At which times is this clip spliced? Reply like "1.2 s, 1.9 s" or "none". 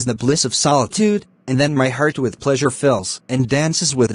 2.6 s

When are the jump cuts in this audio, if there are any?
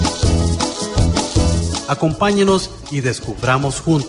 1.8 s

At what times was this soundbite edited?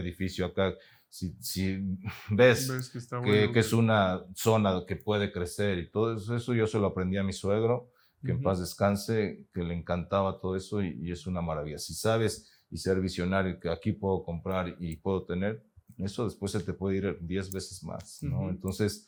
none

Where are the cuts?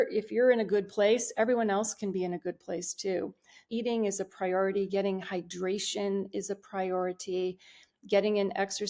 3.6 s

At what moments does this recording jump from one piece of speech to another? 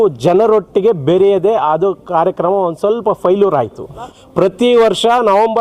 4.2 s

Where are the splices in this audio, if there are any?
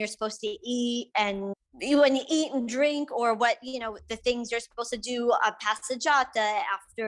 1.6 s

